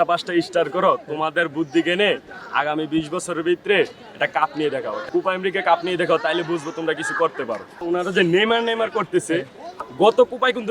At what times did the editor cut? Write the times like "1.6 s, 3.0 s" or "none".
none